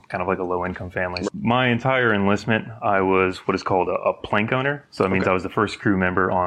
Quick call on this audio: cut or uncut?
cut